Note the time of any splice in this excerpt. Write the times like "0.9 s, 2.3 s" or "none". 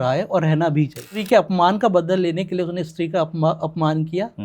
1.2 s